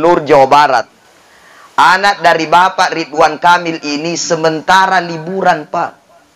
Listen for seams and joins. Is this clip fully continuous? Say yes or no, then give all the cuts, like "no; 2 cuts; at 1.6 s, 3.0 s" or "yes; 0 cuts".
no; 1 cut; at 1.0 s